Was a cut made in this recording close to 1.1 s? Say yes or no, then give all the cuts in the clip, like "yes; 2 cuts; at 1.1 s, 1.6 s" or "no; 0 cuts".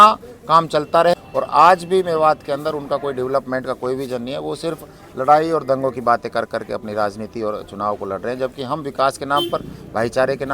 yes; 1 cut; at 1.1 s